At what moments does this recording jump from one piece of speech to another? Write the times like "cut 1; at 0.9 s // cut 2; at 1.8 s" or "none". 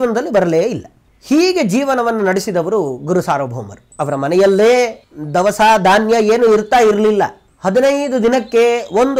cut 1; at 3.9 s // cut 2; at 7.4 s